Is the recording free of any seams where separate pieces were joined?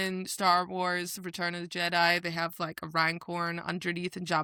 yes; 0 cuts

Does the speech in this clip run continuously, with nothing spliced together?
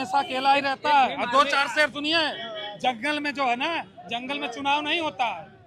yes; 0 cuts

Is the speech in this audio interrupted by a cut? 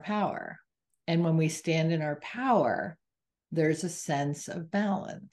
no; 0 cuts

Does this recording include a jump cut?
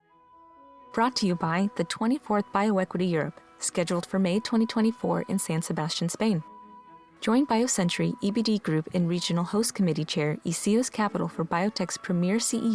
yes; 1 cut; at 0.9 s

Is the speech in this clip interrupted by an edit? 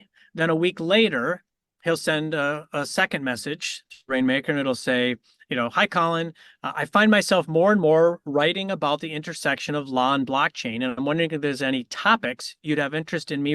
no; 0 cuts

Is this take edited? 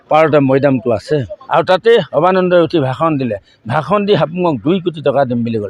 yes; 1 cut; at 1.4 s

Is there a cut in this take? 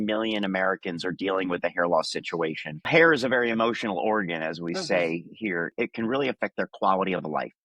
yes; 2 cuts; at 2.9 s, 5.7 s

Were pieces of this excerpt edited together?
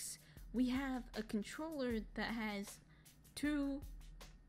no; 0 cuts

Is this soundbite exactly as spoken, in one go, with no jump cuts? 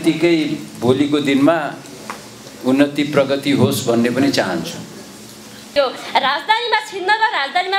no; 1 cut; at 5.7 s

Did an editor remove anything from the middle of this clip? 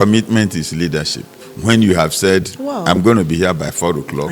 no; 0 cuts

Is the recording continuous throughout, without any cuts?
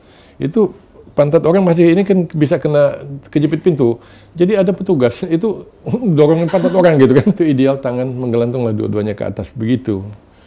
no; 1 cut; at 7.4 s

